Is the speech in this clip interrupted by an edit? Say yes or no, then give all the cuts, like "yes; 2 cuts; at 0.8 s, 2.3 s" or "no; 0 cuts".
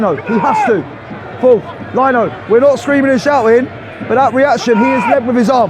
no; 0 cuts